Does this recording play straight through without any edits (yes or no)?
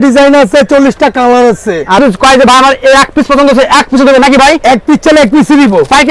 no